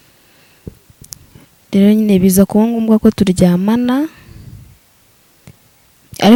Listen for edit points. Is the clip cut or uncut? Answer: uncut